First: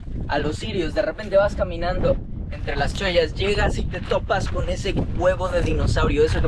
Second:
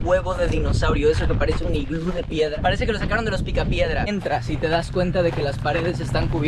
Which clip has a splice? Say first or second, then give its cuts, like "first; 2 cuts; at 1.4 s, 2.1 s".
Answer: second; 2 cuts; at 2.5 s, 4.1 s